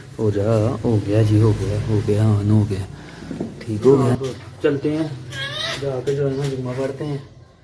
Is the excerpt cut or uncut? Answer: cut